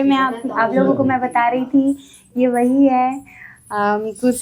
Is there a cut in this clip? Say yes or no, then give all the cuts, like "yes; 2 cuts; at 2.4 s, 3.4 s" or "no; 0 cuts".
no; 0 cuts